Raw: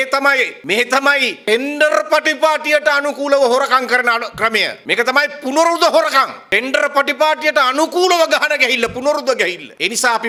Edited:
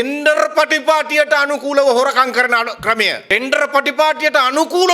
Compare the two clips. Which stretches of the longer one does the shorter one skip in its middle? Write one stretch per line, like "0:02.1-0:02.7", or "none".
0:04.7-0:06.4